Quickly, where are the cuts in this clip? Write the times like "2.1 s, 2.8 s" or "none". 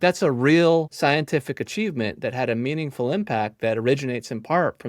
0.9 s